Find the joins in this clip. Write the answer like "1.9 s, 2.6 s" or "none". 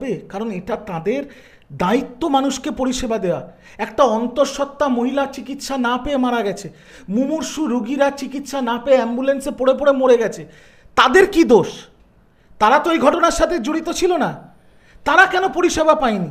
none